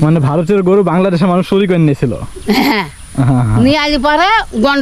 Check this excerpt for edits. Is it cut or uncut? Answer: uncut